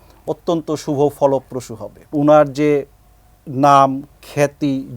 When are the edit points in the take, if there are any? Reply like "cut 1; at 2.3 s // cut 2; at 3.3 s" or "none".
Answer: cut 1; at 2.1 s